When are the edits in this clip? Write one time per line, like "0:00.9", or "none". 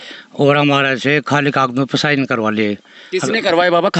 none